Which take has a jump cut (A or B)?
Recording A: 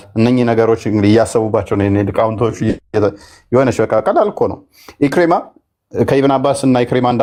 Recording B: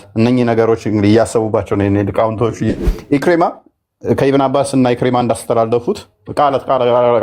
B